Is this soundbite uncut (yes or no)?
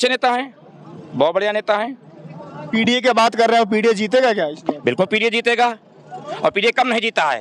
yes